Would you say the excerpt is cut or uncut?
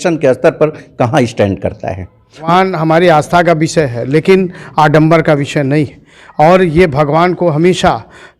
cut